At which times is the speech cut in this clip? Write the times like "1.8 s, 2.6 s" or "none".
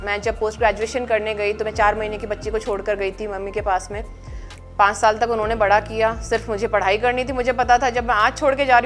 none